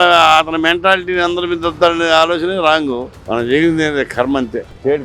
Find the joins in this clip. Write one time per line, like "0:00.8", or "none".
0:03.1

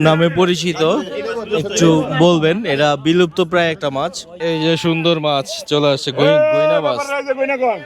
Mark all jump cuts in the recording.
0:04.3

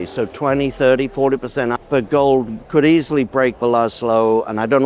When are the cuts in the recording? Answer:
0:01.8
0:02.6

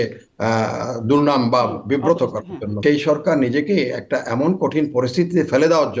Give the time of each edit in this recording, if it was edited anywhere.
0:02.8

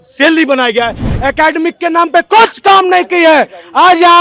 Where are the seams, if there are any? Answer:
0:01.1

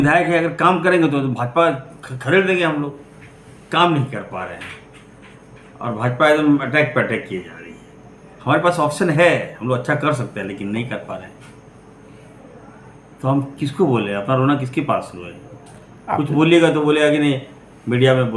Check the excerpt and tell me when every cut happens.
none

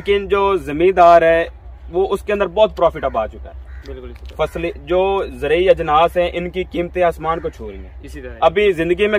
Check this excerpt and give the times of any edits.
none

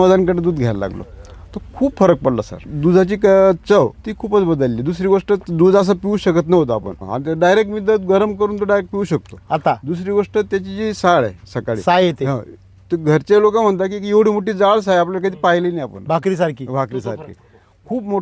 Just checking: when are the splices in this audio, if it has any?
0:02.6
0:04.0
0:06.9

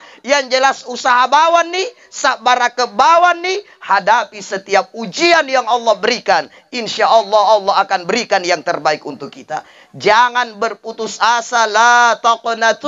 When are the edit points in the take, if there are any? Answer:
none

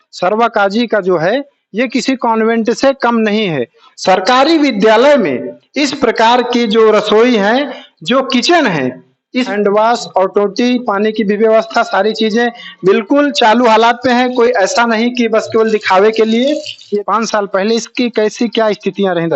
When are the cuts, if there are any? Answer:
0:03.9
0:09.5
0:17.0

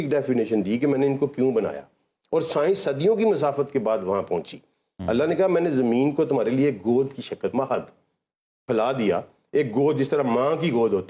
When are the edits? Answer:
none

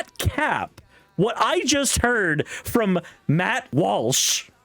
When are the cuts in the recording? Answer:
0:03.7

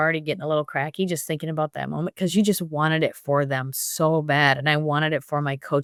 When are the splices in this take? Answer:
none

